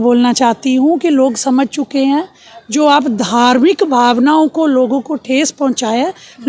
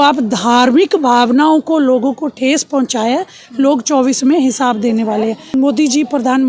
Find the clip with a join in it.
second; 1 cut; at 5.5 s

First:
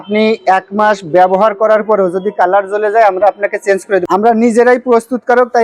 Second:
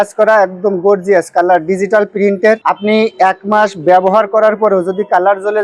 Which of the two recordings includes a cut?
first; 1 cut; at 4.0 s

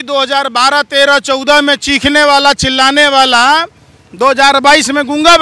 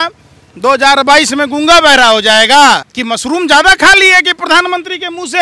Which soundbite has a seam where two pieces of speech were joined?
second; 1 cut; at 2.9 s

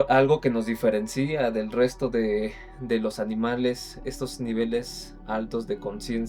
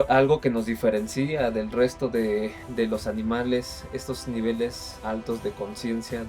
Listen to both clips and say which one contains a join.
second; 2 cuts; at 2.6 s, 4.9 s

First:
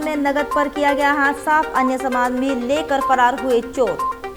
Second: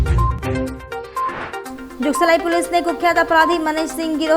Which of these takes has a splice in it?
second; 1 cut; at 1.1 s

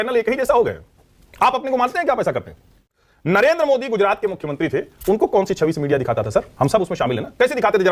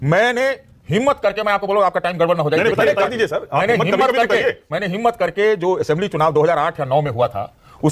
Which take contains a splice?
first; 2 cuts; at 1.3 s, 2.7 s

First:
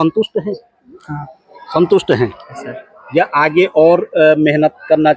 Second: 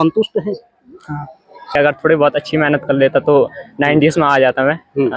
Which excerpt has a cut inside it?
second; 1 cut; at 1.7 s

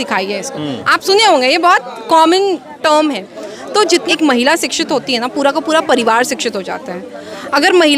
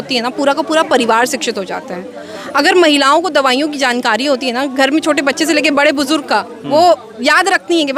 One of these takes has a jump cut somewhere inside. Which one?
first; 1 cut; at 4.1 s

